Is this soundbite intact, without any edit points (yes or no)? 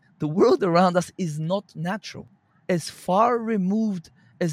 no